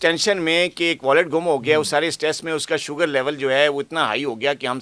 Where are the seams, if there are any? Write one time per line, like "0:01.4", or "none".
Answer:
none